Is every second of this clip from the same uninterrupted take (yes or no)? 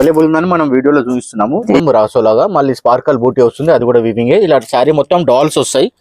no